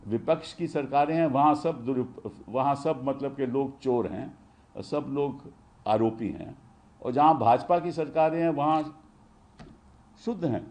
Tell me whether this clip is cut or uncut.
uncut